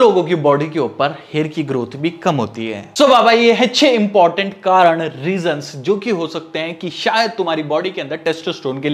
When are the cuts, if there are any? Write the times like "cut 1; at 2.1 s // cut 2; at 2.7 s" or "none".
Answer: none